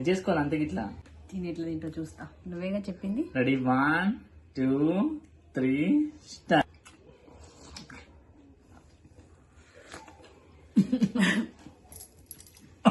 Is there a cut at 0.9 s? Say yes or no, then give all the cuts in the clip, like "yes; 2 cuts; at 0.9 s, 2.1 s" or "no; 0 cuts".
yes; 2 cuts; at 0.9 s, 6.6 s